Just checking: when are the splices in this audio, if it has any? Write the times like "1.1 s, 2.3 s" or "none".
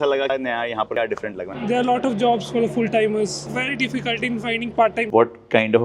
1.5 s, 3.5 s, 5.0 s